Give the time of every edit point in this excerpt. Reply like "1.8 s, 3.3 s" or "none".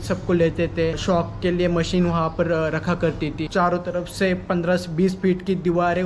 1.0 s, 3.4 s